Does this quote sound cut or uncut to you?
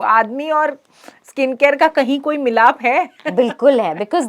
uncut